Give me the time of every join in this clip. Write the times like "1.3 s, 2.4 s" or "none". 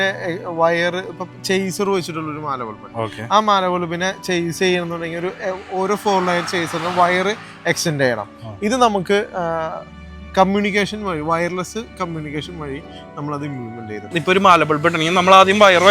14.2 s

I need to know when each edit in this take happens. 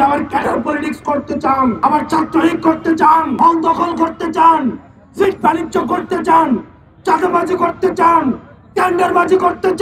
1.8 s, 3.3 s

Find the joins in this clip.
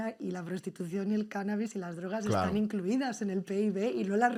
none

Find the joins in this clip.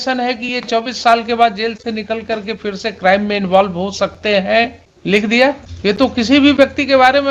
4.9 s, 5.7 s

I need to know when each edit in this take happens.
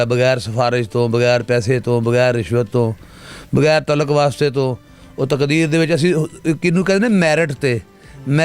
none

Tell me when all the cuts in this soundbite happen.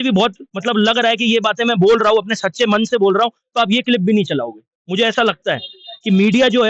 none

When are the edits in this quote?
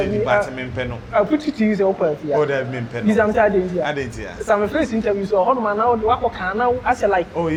none

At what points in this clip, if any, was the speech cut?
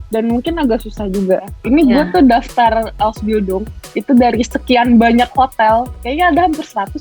1.6 s

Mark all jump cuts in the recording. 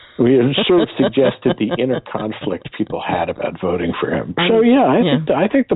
4.3 s

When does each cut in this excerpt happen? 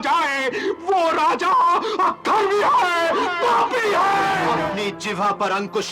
4.5 s

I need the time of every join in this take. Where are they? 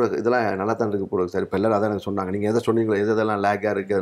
none

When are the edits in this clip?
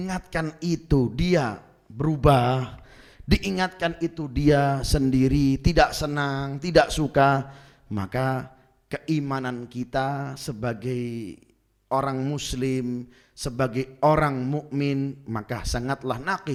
none

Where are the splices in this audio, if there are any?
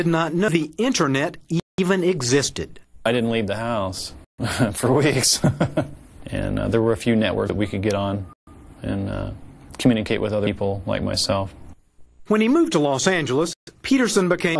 none

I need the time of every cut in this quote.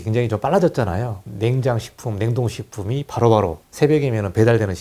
1.2 s, 3.6 s

